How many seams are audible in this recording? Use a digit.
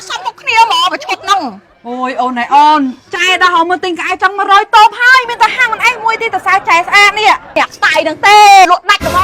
1